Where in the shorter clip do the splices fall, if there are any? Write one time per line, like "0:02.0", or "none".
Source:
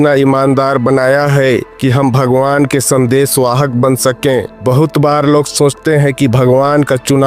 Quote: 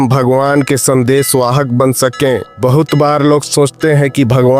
none